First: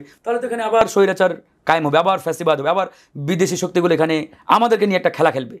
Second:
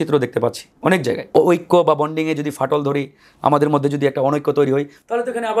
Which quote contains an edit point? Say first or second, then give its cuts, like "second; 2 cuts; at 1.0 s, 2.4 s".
second; 1 cut; at 1.3 s